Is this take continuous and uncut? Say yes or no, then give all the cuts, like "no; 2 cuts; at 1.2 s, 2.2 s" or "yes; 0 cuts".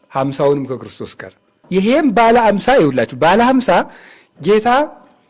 no; 1 cut; at 1.6 s